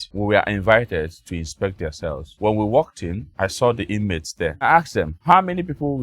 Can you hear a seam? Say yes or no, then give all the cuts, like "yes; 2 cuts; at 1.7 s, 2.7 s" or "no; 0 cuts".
yes; 1 cut; at 4.6 s